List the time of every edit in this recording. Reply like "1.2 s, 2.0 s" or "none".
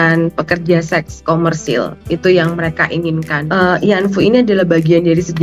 3.3 s